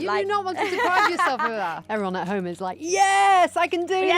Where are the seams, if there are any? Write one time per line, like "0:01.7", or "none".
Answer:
0:01.8